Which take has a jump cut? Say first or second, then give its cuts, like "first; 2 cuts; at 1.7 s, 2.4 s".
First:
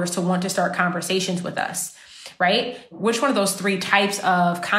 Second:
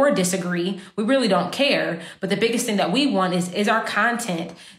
first; 1 cut; at 3.0 s